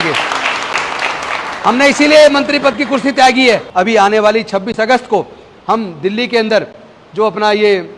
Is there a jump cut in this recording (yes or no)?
yes